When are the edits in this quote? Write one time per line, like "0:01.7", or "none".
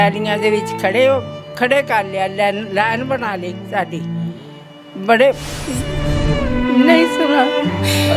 none